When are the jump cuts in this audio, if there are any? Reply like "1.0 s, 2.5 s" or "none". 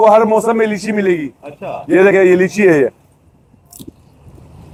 none

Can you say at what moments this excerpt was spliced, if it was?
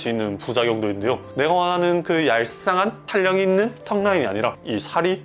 1.2 s

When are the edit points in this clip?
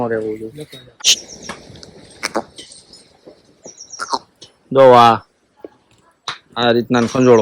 1.0 s

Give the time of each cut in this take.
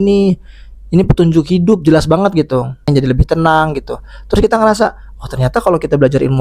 2.9 s

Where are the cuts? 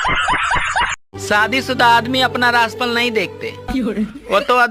1.1 s

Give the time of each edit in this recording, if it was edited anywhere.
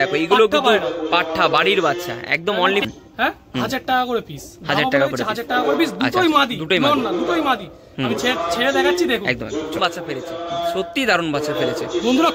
2.8 s, 9.8 s

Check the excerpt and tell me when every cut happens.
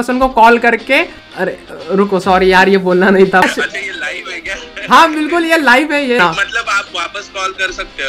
1.6 s, 3.4 s, 6.2 s

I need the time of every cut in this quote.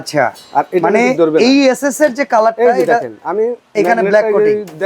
none

